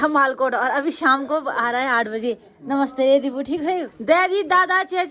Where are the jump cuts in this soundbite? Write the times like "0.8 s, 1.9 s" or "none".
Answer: 3.9 s